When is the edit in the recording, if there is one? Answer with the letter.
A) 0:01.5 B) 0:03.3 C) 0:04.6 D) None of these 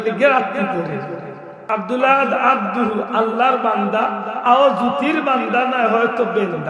A